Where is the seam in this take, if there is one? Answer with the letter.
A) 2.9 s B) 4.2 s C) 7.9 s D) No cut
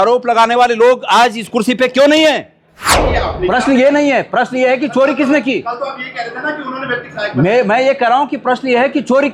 A